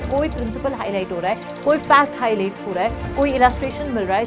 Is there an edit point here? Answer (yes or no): no